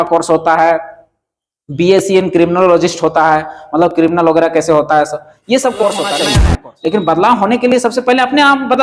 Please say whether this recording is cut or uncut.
cut